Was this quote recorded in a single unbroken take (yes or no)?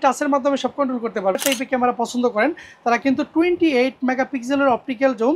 no